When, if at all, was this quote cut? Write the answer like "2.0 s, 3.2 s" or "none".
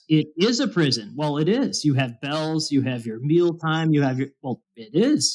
none